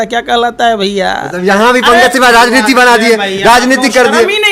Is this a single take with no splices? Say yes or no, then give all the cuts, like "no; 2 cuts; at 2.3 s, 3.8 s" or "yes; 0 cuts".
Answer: yes; 0 cuts